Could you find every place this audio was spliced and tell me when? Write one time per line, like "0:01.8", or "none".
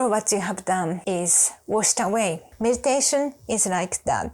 0:01.0
0:02.5